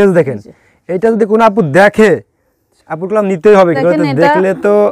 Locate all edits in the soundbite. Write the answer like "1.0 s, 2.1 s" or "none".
3.8 s